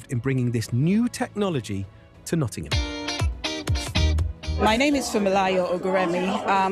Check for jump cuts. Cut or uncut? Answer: uncut